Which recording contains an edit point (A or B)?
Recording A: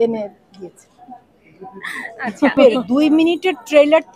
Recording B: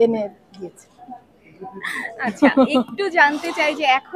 A